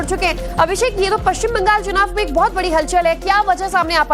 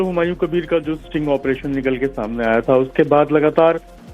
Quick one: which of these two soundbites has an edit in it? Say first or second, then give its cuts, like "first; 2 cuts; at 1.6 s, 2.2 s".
second; 1 cut; at 2.9 s